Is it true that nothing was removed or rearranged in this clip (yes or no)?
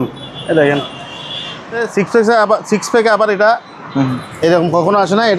no